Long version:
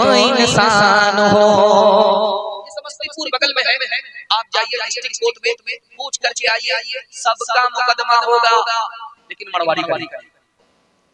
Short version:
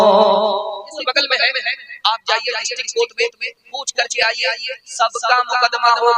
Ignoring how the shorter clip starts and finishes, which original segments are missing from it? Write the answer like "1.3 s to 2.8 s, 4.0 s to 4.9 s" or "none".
2.7 s to 3.2 s